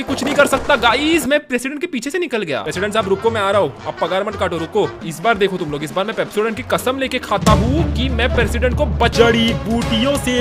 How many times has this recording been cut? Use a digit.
3